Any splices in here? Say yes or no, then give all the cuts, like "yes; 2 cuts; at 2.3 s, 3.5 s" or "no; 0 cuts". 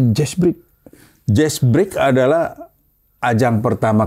no; 0 cuts